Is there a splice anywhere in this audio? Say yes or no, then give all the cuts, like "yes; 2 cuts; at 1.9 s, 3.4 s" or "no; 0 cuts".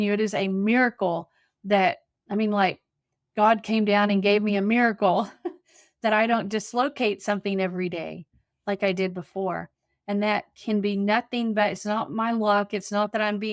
no; 0 cuts